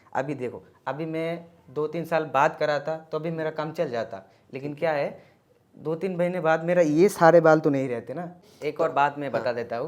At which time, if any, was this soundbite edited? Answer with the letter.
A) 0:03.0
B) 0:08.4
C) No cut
B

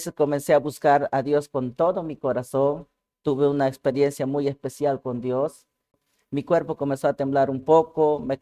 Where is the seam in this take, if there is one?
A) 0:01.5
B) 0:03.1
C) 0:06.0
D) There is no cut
C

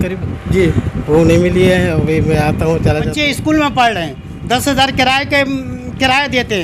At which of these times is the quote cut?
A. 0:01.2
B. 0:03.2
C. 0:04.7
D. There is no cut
B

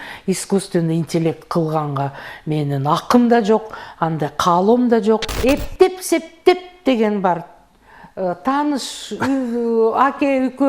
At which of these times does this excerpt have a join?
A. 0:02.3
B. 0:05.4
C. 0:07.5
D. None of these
B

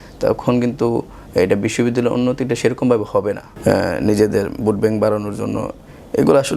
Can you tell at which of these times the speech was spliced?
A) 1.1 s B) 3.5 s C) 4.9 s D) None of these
B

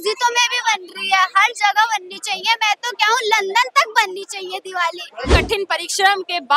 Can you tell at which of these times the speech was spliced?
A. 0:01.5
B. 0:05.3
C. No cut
B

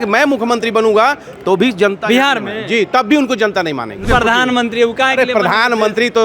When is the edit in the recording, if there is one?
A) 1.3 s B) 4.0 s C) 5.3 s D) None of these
B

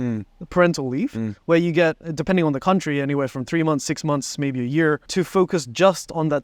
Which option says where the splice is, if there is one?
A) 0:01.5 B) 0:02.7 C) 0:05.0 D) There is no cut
C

